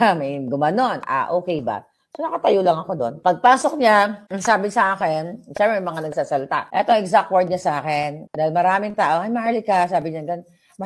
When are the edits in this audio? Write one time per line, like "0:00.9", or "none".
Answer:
0:03.1
0:04.3
0:06.7
0:08.2